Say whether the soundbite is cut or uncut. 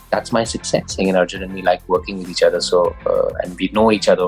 cut